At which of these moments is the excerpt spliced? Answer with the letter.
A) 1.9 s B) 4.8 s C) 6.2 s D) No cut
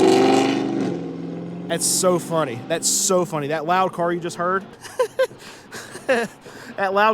B